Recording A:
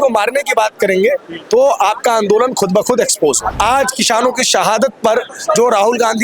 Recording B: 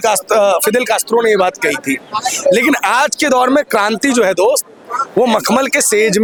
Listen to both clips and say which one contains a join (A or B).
A